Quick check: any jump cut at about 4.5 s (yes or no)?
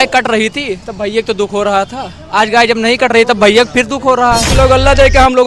yes